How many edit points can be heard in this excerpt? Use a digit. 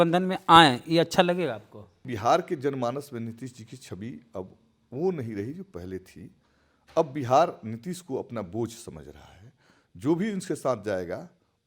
1